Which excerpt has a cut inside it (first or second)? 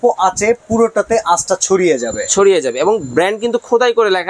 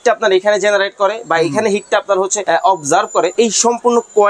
second